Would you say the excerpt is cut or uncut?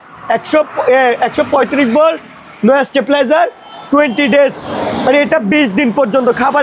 uncut